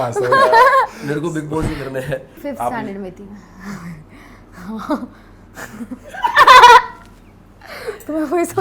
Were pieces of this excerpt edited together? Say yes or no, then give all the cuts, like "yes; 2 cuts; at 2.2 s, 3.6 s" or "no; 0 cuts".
yes; 1 cut; at 2.4 s